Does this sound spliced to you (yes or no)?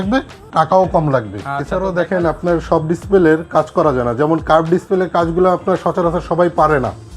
yes